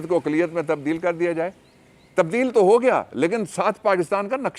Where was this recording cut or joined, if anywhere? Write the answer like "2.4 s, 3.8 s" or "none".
none